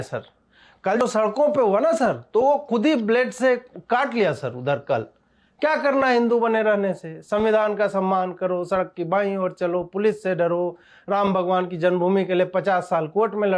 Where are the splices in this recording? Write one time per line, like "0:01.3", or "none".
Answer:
0:01.0